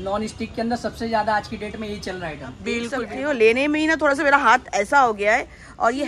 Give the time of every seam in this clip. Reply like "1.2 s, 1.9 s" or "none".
3.0 s